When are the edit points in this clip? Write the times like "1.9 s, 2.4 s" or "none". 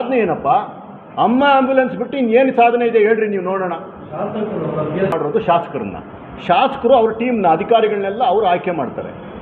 none